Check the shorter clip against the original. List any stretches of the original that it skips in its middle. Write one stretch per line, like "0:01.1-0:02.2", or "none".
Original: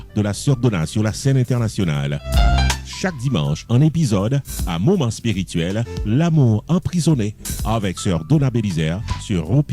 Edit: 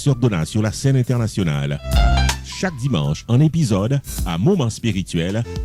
none